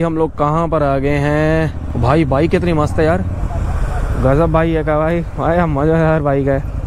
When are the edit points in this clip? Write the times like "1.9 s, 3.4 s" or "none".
none